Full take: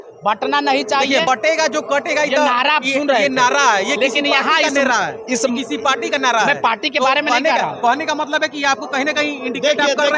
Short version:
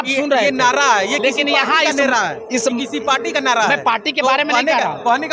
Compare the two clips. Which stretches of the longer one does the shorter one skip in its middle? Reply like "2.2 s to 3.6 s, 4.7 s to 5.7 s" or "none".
none